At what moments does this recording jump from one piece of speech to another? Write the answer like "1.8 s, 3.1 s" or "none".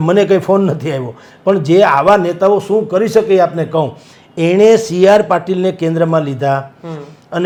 none